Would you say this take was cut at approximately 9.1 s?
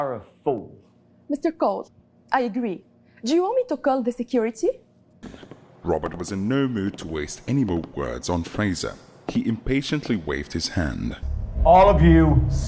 no; 2 cuts; at 5.2 s, 11.3 s

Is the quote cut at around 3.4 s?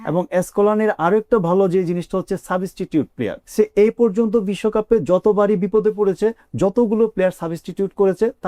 yes; 1 cut; at 3.4 s

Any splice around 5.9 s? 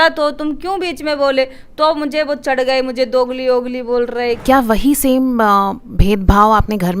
no; 1 cut; at 4.4 s

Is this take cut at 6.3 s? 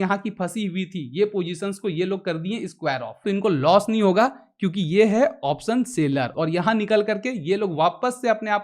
yes; 2 cuts; at 3.2 s, 6.3 s

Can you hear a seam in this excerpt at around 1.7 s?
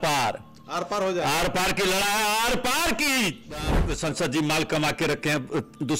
no; 1 cut; at 3.8 s

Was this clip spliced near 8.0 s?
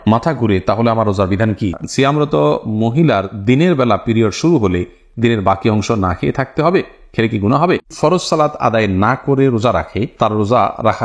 yes; 2 cuts; at 1.8 s, 8.0 s

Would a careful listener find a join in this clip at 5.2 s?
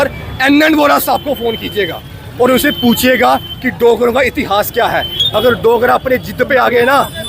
yes; 1 cut; at 5.2 s

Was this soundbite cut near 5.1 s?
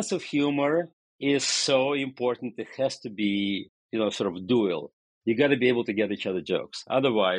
no; 2 cuts; at 1.0 s, 3.7 s

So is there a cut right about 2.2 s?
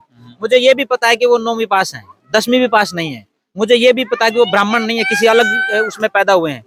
no; 0 cuts

